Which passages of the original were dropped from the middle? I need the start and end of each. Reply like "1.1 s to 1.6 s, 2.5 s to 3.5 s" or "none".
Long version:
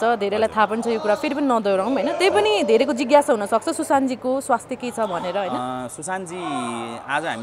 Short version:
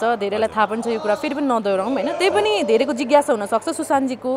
none